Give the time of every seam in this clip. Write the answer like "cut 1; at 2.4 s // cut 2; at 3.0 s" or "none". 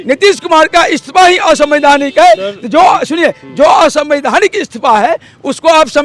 none